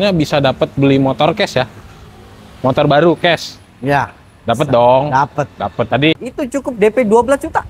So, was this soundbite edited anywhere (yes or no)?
yes